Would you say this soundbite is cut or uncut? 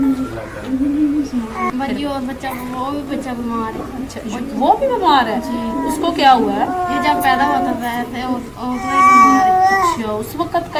uncut